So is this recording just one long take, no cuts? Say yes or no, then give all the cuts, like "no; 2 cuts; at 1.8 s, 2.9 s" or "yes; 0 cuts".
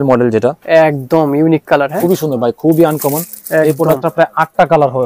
no; 1 cut; at 1.9 s